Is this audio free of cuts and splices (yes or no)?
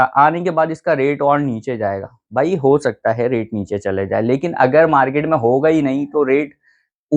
yes